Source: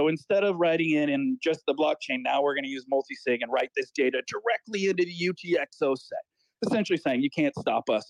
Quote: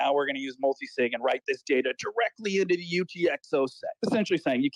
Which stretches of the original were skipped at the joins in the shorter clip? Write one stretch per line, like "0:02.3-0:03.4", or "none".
0:06.1-0:06.5